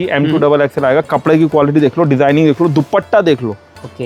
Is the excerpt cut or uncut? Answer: uncut